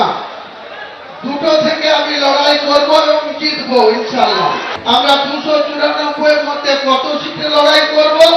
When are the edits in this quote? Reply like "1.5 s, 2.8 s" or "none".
4.7 s